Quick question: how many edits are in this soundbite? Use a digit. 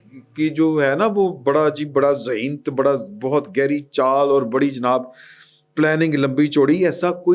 0